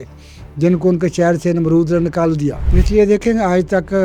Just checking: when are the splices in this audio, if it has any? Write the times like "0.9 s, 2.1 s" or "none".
2.6 s